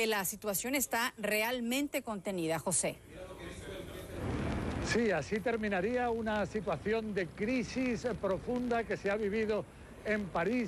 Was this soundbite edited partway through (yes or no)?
yes